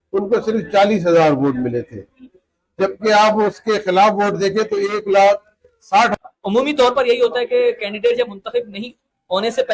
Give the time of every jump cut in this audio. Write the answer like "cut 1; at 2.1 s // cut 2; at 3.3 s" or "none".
cut 1; at 6.1 s